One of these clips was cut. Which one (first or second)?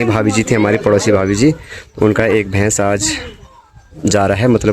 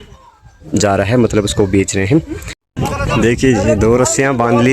second